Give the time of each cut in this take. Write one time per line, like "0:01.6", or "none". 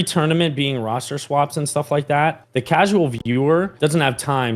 0:02.4
0:03.7